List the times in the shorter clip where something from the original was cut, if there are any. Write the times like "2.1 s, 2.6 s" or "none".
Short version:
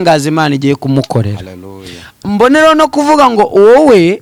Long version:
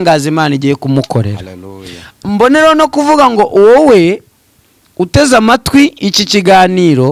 none